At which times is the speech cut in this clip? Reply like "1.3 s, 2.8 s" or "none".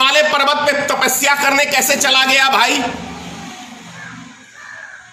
none